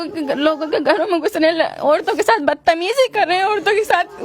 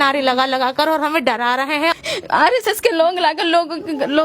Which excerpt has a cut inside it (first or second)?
second